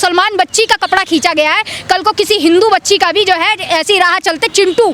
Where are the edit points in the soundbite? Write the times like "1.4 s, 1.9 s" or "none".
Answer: none